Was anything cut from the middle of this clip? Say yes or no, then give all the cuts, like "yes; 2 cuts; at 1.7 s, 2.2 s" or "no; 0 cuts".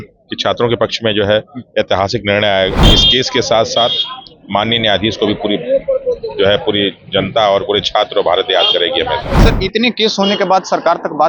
yes; 2 cuts; at 2.9 s, 9.3 s